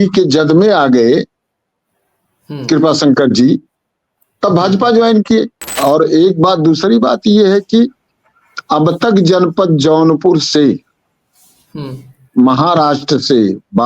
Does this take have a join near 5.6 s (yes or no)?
yes